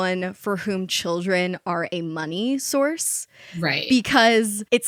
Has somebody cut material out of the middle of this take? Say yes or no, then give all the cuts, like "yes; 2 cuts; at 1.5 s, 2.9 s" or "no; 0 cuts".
no; 0 cuts